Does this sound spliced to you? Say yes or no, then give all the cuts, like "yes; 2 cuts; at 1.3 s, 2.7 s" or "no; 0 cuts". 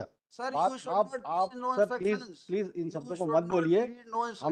no; 0 cuts